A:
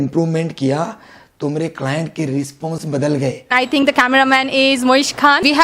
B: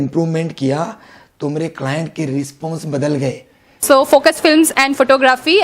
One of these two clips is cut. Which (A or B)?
A